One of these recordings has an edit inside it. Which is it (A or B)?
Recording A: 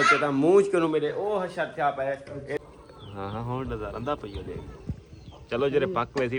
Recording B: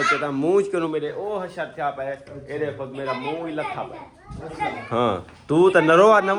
A